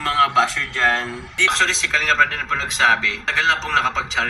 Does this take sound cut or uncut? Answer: cut